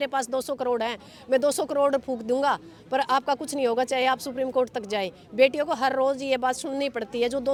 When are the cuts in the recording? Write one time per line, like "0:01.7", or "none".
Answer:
none